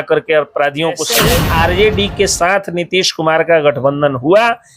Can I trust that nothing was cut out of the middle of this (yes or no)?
no